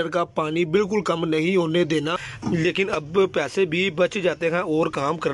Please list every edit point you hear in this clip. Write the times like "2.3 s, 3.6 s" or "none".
2.3 s